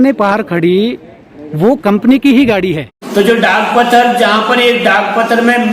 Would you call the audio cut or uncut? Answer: cut